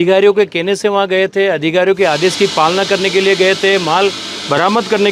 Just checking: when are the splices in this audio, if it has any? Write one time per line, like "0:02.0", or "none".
none